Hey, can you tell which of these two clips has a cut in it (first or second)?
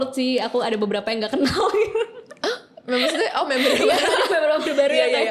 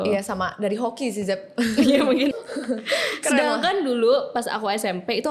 second